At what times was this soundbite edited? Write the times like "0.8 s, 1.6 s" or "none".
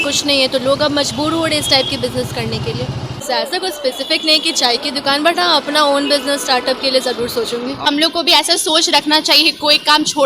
3.2 s, 7.9 s